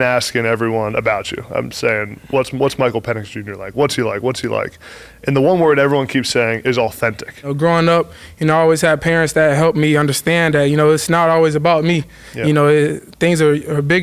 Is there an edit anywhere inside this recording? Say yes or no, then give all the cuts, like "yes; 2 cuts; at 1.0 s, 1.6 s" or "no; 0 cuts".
yes; 1 cut; at 7.5 s